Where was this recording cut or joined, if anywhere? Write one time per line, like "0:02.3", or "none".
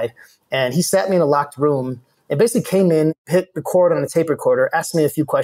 0:03.2